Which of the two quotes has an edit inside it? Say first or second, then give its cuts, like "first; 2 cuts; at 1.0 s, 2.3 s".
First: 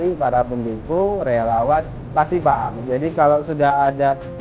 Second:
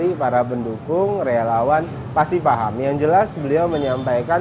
first; 1 cut; at 2.8 s